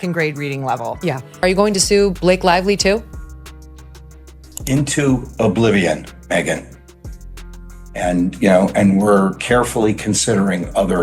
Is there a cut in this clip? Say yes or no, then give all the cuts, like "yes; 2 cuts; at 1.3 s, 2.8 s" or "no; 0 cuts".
yes; 1 cut; at 1.2 s